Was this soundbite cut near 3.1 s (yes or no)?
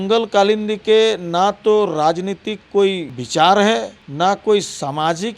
yes